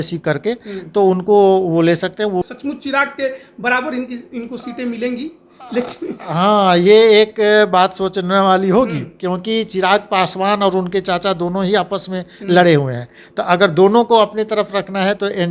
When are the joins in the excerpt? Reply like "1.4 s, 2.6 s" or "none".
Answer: 2.4 s